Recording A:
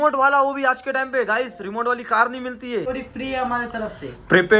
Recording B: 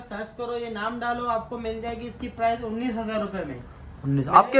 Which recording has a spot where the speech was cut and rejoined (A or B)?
A